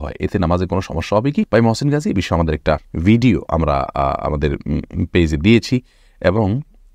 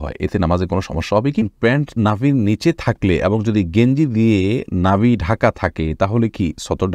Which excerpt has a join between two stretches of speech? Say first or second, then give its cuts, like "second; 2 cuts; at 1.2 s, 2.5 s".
second; 1 cut; at 1.5 s